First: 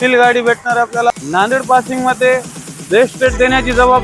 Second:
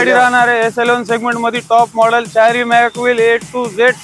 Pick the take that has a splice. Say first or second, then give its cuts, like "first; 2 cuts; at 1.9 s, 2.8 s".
first; 1 cut; at 1.1 s